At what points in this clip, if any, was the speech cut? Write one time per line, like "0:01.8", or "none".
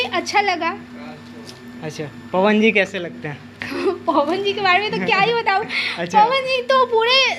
none